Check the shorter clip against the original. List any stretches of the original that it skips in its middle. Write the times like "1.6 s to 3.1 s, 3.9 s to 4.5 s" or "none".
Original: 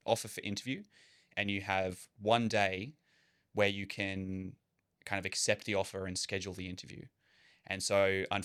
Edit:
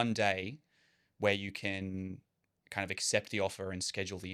none